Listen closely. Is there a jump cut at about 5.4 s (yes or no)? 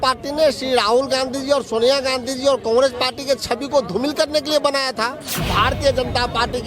yes